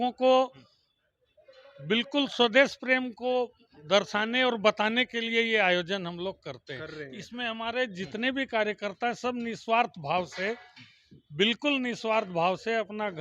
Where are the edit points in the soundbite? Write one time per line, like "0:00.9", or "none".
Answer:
none